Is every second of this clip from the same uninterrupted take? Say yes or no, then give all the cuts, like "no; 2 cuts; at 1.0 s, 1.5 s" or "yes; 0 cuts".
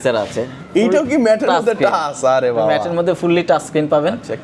yes; 0 cuts